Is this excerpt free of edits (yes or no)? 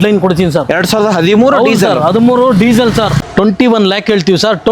no